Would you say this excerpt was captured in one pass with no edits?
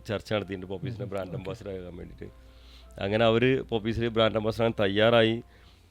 yes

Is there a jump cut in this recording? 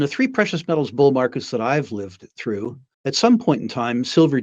yes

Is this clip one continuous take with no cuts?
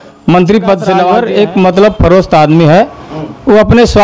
no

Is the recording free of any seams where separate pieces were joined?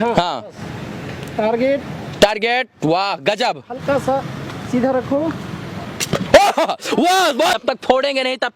no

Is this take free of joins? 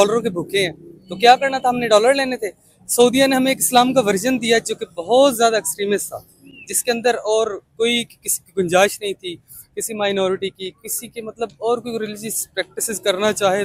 yes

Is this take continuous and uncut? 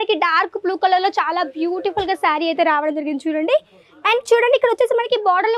yes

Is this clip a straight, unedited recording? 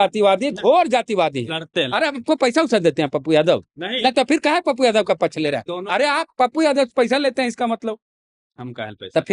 yes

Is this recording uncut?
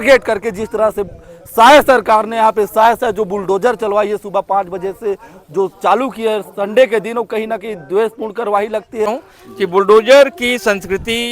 no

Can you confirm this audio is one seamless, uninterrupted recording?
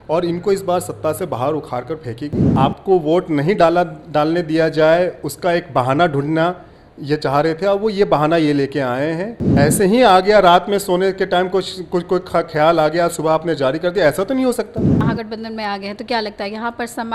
no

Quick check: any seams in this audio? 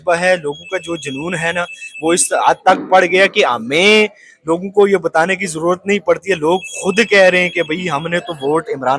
no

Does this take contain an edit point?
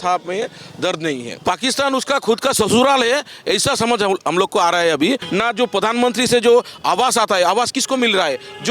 yes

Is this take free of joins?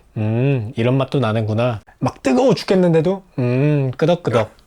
no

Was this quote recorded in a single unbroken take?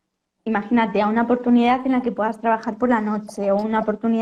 yes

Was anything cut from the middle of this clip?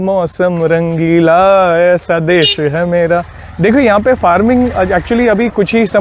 no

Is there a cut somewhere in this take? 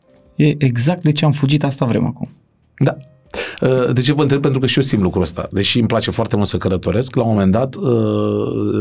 no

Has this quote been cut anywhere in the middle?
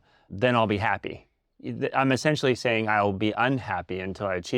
no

